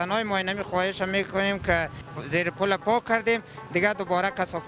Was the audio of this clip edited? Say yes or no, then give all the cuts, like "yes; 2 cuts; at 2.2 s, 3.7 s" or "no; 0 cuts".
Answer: yes; 1 cut; at 2.1 s